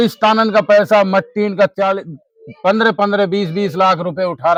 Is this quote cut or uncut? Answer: uncut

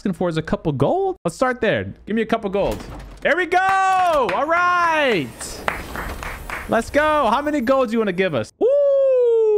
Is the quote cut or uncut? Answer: uncut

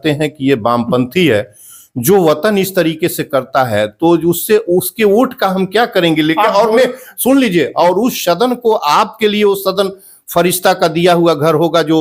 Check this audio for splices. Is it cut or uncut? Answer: uncut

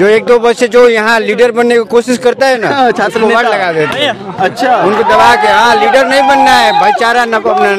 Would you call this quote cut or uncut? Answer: uncut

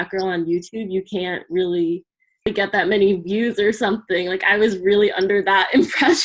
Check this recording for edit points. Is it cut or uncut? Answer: cut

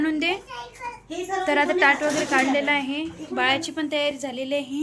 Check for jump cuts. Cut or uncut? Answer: uncut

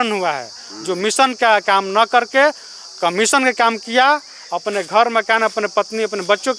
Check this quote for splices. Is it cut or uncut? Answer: uncut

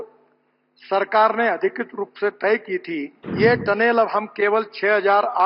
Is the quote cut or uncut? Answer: cut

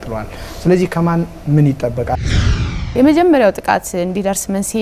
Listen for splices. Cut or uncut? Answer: cut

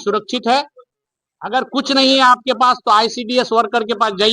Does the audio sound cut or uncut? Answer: uncut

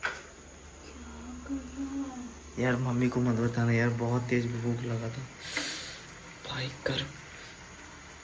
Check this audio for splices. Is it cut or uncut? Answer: uncut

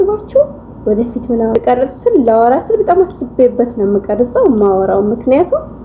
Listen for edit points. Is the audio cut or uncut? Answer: cut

